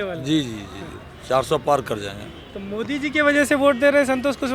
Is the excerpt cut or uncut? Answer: uncut